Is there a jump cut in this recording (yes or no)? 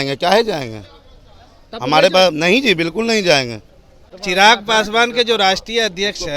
yes